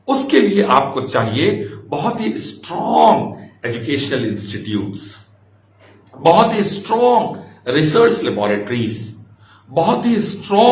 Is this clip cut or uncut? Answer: uncut